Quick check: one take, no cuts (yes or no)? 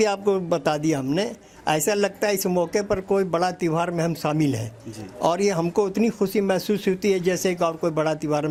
yes